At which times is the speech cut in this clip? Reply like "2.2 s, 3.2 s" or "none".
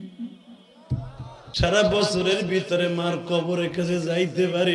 1.4 s